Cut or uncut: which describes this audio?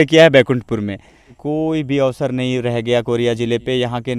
cut